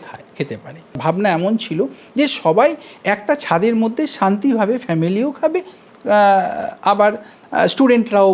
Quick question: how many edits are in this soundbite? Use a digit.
1